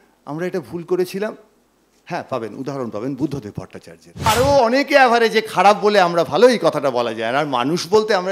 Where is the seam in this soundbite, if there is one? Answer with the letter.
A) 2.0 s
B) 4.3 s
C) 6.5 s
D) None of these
B